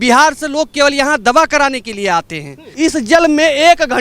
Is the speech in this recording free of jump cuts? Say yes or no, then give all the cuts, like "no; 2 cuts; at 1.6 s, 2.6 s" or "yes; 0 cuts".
no; 1 cut; at 2.7 s